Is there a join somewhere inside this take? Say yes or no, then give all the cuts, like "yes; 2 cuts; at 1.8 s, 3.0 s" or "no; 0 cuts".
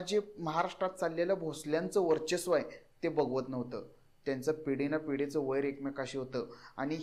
no; 0 cuts